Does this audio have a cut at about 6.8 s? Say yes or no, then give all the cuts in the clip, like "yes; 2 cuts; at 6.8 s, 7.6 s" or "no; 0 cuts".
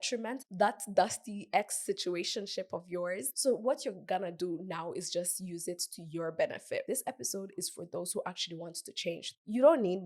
yes; 2 cuts; at 3.3 s, 6.8 s